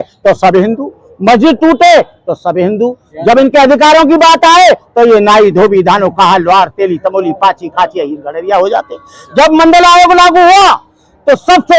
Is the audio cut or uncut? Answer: uncut